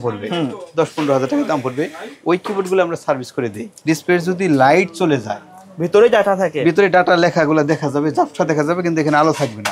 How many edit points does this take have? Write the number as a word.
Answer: one